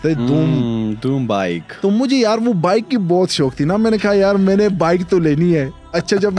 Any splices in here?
no; 0 cuts

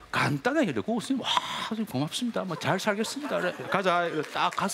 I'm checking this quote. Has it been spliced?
no; 0 cuts

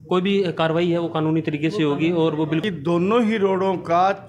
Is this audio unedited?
no; 1 cut; at 2.6 s

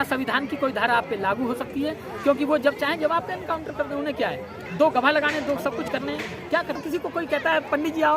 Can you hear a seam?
yes; 1 cut; at 6.8 s

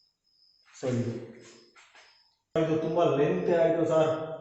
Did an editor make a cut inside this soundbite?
yes; 1 cut; at 2.6 s

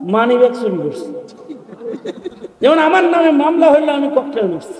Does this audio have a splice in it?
yes; 1 cut; at 2.5 s

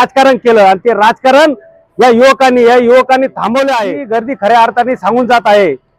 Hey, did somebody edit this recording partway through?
yes; 1 cut; at 3.9 s

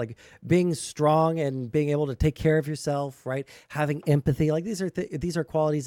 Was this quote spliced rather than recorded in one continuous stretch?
no; 0 cuts

